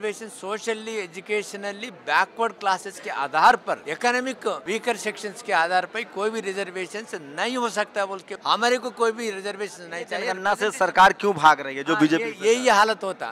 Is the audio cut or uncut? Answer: cut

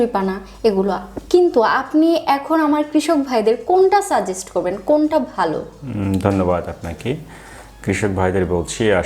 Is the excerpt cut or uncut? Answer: uncut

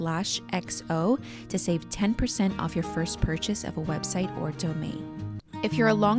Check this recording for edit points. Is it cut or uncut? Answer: uncut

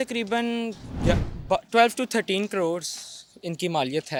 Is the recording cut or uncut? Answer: uncut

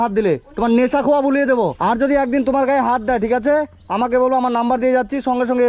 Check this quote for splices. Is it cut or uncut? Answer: cut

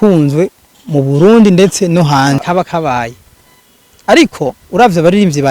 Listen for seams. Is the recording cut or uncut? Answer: cut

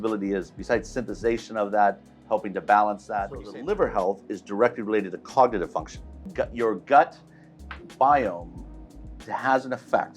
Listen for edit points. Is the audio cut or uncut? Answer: cut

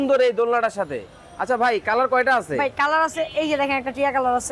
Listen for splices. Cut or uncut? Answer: uncut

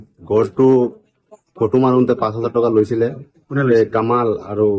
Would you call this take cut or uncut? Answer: uncut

